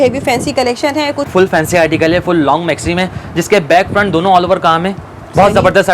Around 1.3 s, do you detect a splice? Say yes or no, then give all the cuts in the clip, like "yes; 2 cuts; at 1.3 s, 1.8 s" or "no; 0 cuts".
yes; 1 cut; at 1.3 s